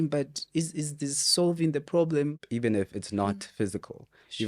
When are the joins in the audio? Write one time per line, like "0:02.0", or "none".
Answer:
0:02.4